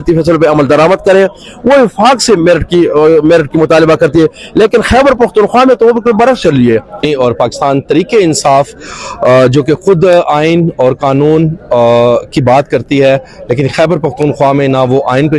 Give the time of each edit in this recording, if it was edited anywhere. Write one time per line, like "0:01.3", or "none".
0:07.0